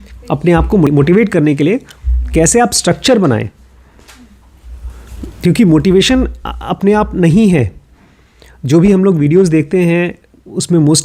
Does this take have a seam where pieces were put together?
yes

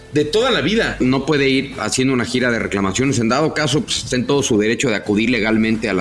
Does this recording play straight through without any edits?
no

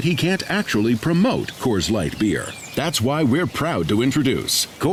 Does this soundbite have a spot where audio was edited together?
no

